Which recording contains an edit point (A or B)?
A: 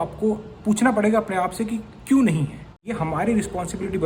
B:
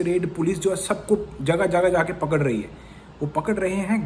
A